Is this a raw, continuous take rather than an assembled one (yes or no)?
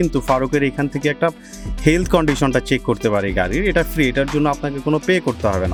yes